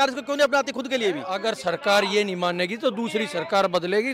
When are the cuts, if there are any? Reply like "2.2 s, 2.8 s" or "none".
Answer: 1.3 s